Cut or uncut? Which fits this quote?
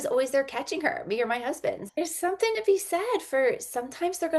cut